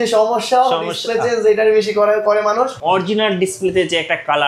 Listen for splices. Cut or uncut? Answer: cut